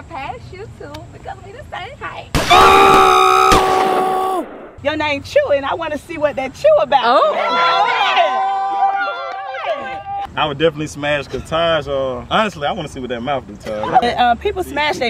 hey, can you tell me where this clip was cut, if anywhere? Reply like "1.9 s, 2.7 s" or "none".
4.7 s, 10.2 s, 12.2 s, 14.0 s